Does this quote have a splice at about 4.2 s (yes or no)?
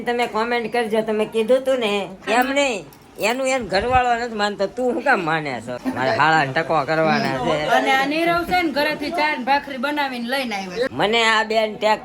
no